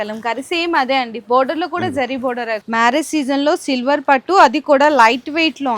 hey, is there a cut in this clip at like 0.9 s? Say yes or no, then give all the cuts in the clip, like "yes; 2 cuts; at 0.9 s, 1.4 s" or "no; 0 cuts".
no; 1 cut; at 2.6 s